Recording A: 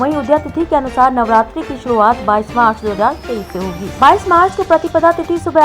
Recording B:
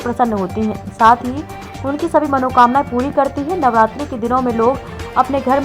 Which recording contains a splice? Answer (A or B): A